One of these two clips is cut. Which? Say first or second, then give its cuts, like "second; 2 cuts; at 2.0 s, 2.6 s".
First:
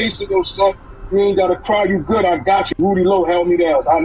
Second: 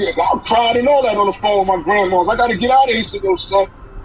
first; 1 cut; at 2.8 s